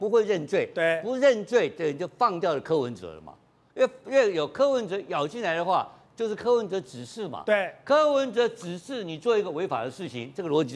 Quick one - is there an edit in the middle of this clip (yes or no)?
no